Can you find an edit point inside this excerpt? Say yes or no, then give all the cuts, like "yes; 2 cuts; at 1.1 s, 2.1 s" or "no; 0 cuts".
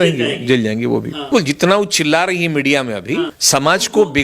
yes; 2 cuts; at 1.2 s, 3.4 s